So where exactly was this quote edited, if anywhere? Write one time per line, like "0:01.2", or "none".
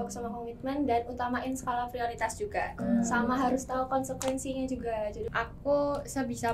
0:02.8
0:05.3